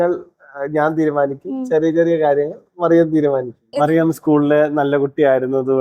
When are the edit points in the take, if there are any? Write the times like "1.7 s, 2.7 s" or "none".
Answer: 3.6 s